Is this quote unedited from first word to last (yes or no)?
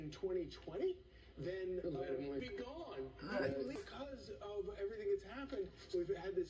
no